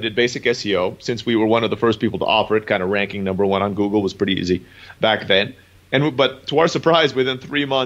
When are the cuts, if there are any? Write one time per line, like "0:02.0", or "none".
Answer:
none